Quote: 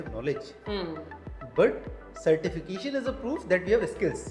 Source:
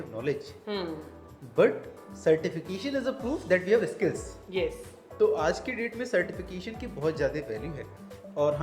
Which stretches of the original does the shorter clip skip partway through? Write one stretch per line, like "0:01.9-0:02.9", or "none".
none